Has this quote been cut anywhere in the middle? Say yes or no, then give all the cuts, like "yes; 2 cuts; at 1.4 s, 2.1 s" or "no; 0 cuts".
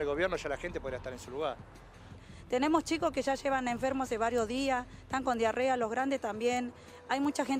yes; 1 cut; at 2.1 s